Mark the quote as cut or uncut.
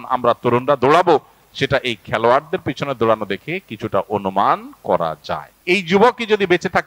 cut